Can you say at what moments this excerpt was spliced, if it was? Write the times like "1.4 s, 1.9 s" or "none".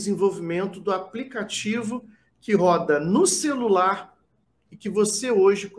none